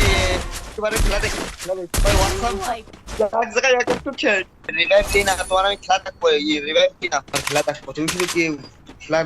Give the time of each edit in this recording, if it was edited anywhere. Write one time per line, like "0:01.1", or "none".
0:02.9
0:04.8
0:07.4